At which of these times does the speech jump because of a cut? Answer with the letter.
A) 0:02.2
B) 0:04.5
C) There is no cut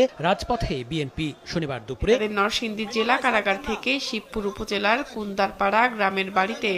A